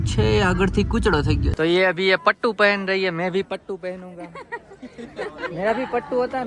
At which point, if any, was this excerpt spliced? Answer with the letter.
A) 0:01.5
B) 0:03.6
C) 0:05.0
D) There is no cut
A